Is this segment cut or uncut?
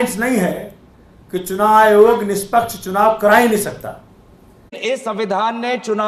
cut